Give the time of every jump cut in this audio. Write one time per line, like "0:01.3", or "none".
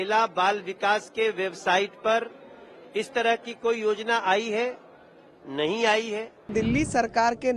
0:06.5